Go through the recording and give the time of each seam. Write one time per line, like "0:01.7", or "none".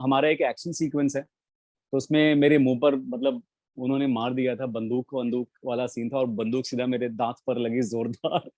none